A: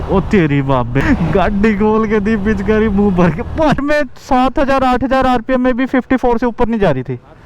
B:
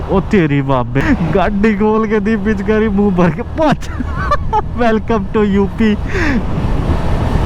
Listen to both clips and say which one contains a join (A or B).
A